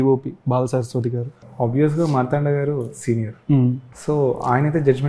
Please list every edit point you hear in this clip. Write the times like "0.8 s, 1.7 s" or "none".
1.5 s, 3.9 s